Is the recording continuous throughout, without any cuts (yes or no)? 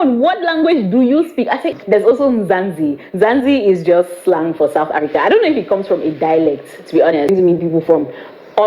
no